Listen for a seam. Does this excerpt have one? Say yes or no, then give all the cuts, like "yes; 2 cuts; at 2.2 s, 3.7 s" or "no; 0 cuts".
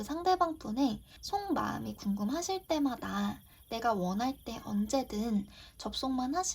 yes; 1 cut; at 1.1 s